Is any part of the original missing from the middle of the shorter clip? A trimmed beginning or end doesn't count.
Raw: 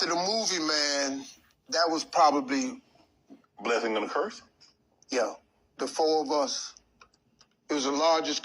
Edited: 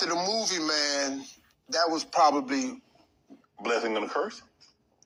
no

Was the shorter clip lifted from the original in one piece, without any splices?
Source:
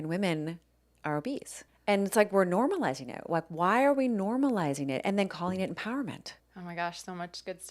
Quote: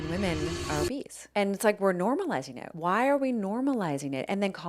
no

